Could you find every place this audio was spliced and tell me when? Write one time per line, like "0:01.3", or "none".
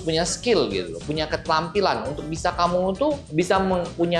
none